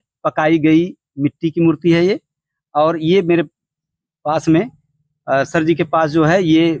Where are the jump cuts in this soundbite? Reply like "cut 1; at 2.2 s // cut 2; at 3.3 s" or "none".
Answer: none